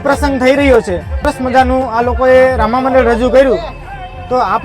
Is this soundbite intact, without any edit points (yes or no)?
no